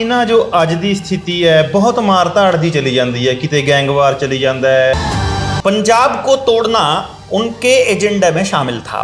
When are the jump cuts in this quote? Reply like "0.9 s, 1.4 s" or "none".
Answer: 5.0 s